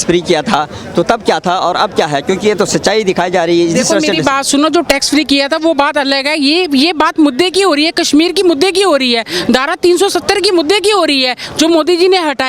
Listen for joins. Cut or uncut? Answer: uncut